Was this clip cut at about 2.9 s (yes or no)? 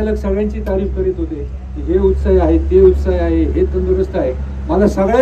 no